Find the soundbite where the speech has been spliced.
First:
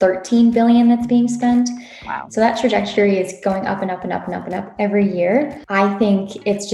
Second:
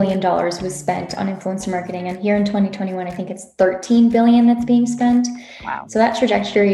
first; 1 cut; at 5.6 s

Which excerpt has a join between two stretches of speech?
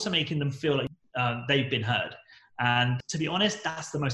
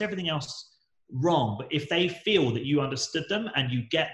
first; 2 cuts; at 0.9 s, 2.9 s

